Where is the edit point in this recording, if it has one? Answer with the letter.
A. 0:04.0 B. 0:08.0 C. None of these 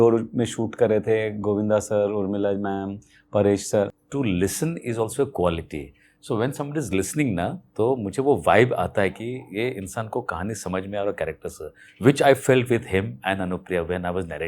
A